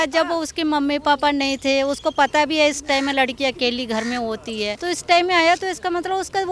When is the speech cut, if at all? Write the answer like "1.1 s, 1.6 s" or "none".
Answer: 4.8 s